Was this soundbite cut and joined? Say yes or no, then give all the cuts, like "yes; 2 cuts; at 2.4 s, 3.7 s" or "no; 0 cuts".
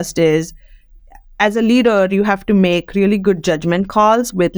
no; 0 cuts